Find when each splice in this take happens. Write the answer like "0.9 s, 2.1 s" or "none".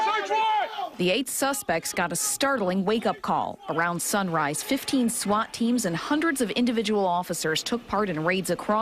none